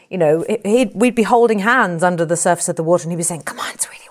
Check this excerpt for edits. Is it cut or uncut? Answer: uncut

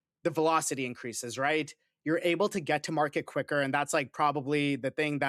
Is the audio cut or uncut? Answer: uncut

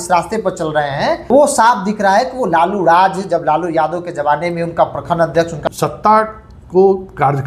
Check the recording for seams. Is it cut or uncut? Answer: cut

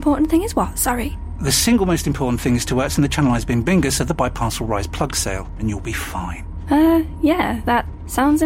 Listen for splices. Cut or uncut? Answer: uncut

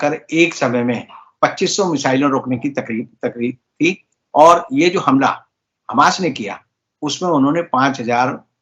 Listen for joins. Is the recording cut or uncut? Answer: uncut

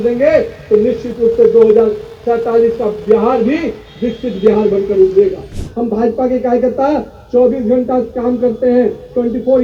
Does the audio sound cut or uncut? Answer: cut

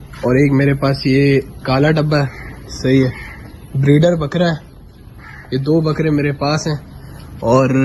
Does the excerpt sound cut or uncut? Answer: uncut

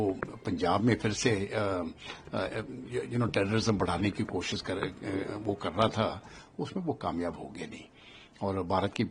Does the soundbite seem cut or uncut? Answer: uncut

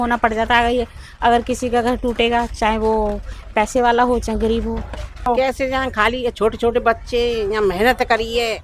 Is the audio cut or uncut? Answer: cut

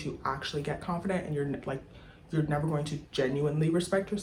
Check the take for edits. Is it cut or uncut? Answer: uncut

